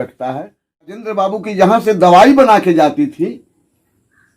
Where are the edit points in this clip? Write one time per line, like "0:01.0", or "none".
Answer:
0:01.0